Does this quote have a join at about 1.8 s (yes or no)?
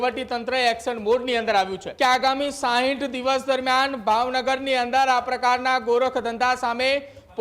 yes